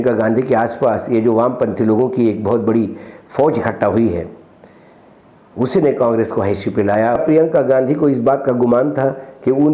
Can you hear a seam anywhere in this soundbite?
yes; 1 cut; at 7.2 s

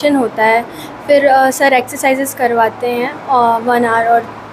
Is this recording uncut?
yes; 0 cuts

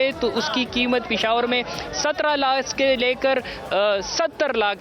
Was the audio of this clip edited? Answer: no; 0 cuts

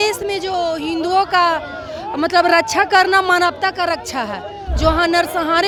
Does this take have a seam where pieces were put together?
no; 0 cuts

